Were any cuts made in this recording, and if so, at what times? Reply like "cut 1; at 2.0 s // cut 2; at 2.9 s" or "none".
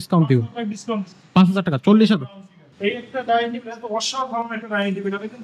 cut 1; at 2.7 s